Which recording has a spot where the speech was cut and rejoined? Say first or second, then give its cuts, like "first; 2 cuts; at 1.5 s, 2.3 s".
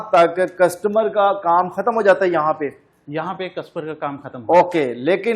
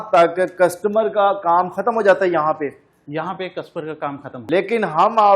second; 1 cut; at 4.4 s